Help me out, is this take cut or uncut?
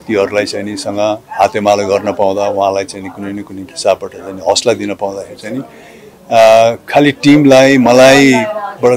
uncut